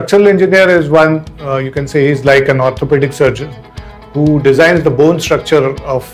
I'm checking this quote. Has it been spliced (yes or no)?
no